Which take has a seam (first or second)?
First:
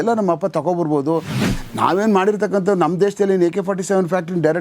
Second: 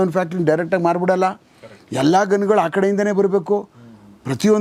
first